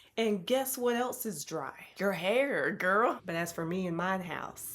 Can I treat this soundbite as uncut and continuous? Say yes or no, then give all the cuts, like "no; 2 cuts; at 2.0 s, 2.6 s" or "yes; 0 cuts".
no; 1 cut; at 3.2 s